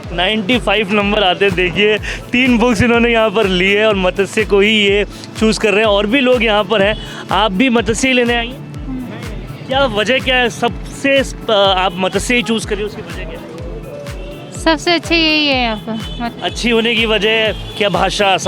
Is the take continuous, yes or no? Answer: yes